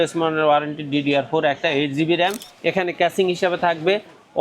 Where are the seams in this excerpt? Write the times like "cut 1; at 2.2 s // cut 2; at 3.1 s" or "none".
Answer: cut 1; at 2.5 s